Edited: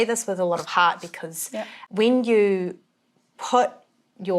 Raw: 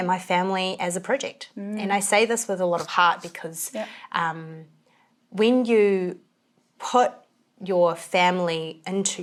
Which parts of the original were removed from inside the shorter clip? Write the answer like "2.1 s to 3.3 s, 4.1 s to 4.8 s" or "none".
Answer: 4.0 s to 5.2 s

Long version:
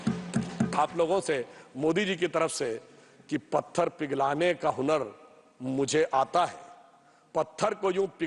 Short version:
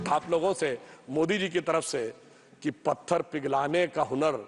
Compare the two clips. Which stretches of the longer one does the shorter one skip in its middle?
none

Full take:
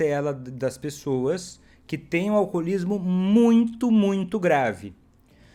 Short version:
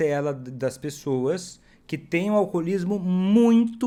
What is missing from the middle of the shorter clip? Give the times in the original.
none

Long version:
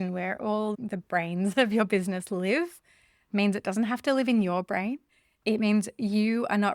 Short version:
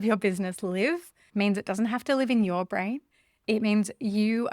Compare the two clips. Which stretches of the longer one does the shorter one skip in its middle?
2.8 s to 3.1 s

